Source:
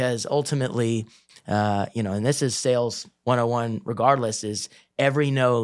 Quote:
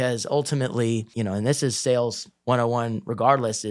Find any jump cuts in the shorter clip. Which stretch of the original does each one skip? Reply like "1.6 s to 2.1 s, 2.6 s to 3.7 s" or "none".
1.1 s to 1.9 s